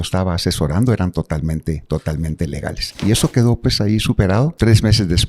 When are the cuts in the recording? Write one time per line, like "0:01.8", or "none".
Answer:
0:03.0
0:04.5